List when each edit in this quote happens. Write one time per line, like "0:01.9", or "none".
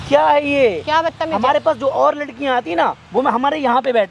none